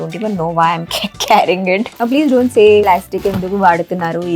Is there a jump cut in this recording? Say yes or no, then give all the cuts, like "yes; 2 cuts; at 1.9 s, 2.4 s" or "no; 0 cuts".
yes; 2 cuts; at 1.9 s, 2.8 s